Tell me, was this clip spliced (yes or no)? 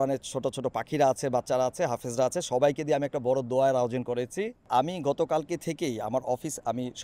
yes